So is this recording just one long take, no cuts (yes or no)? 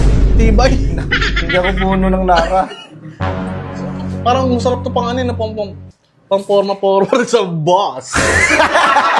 yes